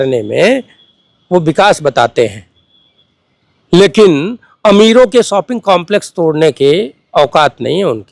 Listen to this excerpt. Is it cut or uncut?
uncut